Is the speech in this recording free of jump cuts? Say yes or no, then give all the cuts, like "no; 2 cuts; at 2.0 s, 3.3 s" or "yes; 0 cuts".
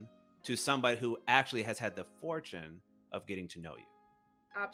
yes; 0 cuts